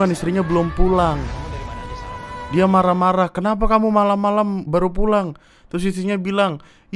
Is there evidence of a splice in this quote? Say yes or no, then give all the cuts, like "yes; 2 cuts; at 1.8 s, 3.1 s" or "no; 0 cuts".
no; 0 cuts